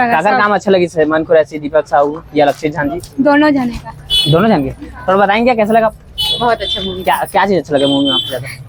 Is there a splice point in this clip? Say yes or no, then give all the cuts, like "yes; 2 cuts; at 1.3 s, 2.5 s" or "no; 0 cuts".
no; 0 cuts